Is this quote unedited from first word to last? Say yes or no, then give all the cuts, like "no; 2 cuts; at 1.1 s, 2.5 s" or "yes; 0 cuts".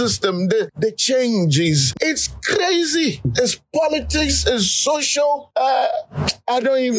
no; 1 cut; at 1.9 s